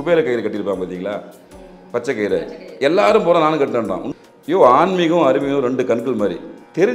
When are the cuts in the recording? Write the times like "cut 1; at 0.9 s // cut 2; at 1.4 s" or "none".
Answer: cut 1; at 4.1 s